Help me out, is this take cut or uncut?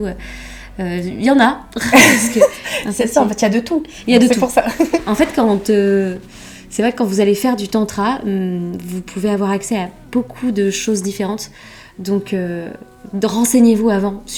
uncut